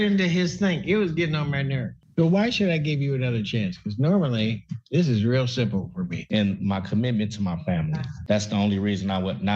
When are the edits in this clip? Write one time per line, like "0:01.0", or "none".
0:01.9
0:06.2